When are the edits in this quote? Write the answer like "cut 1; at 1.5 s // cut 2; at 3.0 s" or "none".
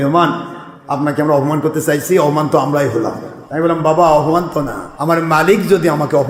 none